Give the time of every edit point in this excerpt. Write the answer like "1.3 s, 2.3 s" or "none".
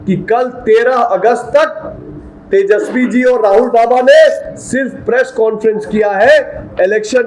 none